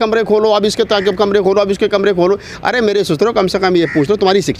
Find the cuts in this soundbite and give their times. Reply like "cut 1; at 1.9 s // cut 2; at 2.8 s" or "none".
none